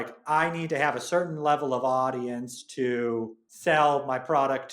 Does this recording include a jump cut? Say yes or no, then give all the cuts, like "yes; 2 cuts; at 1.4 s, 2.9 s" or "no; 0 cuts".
yes; 1 cut; at 3.4 s